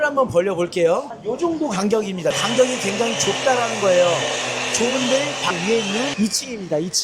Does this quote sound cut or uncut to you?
cut